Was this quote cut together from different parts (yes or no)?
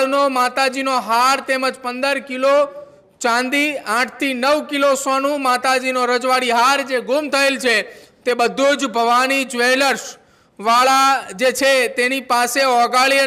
no